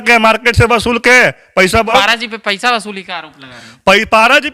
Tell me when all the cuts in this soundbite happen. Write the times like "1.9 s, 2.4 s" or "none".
1.9 s